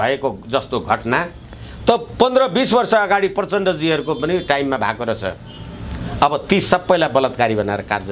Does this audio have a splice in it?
no; 0 cuts

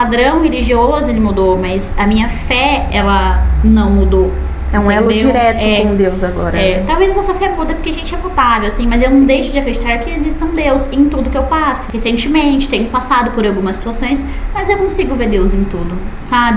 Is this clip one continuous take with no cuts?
yes; 0 cuts

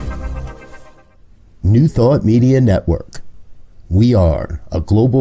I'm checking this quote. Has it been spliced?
yes; 1 cut; at 1.0 s

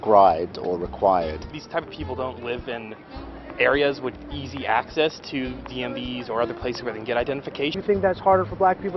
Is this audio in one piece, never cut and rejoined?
no; 1 cut; at 7.7 s

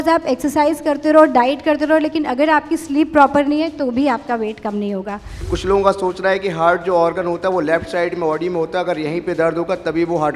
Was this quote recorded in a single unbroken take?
no; 1 cut; at 5.5 s

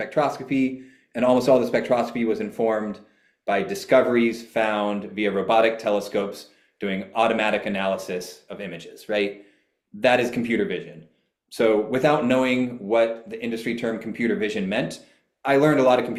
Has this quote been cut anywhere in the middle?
no; 0 cuts

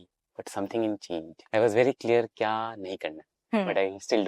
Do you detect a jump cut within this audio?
yes; 1 cut; at 1.3 s

